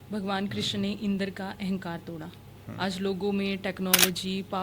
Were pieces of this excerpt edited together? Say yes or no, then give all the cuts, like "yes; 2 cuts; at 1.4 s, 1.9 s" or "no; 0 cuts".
no; 0 cuts